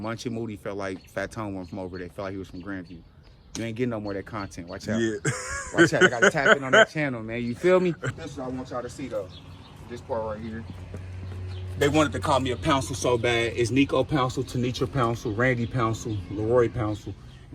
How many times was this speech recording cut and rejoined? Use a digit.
1